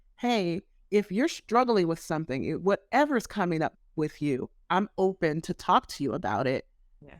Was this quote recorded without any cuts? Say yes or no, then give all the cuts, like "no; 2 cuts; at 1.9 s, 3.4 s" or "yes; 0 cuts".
no; 1 cut; at 4.5 s